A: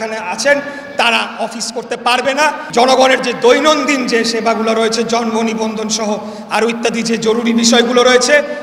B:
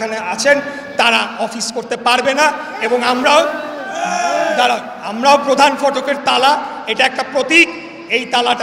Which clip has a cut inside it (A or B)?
A